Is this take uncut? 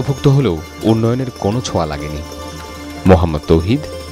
yes; 0 cuts

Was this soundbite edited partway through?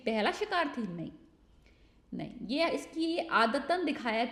no; 0 cuts

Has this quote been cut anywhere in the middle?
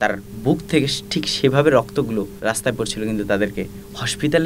yes; 1 cut; at 2.3 s

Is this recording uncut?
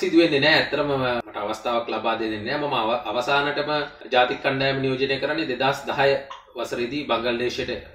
yes; 0 cuts

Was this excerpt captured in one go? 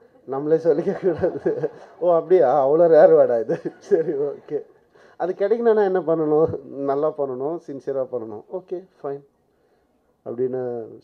yes; 0 cuts

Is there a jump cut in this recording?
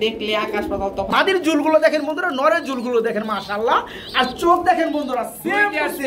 yes; 1 cut; at 1.1 s

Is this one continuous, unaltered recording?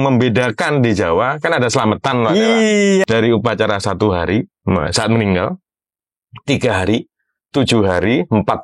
no; 1 cut; at 3.0 s

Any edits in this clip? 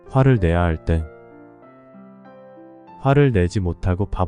no; 0 cuts

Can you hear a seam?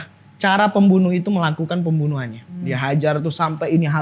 yes; 1 cut; at 2.6 s

